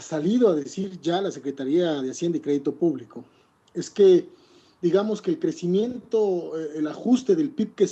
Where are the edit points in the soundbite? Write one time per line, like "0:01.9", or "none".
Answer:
0:07.0